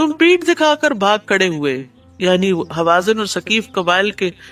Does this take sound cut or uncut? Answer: uncut